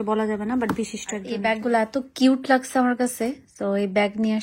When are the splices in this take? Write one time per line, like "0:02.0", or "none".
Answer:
0:01.3